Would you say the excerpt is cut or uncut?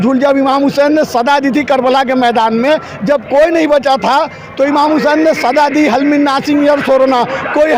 uncut